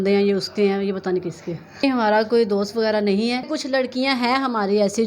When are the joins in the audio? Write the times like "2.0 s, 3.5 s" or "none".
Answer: 1.8 s, 3.5 s